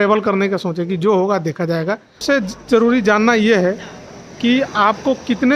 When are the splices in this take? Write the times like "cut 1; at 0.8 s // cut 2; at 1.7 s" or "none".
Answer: cut 1; at 2.2 s

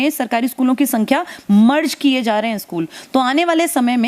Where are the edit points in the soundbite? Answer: none

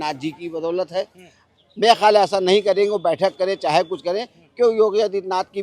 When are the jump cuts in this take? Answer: none

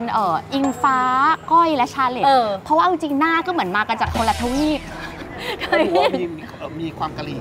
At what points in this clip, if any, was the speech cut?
none

